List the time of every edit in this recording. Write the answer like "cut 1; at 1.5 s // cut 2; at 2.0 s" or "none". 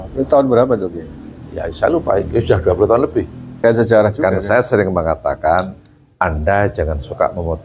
cut 1; at 3.4 s